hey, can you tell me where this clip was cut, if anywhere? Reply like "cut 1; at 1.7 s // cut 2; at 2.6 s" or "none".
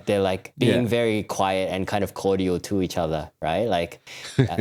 none